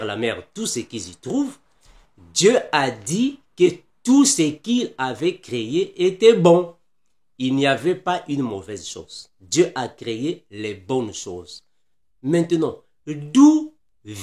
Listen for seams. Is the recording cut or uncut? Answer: uncut